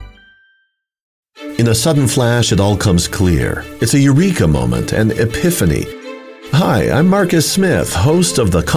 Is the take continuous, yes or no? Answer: no